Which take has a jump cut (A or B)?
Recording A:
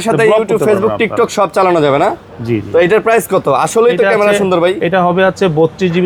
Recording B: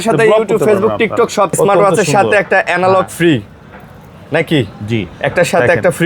B